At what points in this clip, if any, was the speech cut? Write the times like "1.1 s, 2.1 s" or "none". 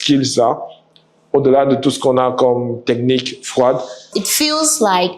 4.2 s